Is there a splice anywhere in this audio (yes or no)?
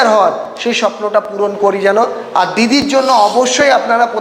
no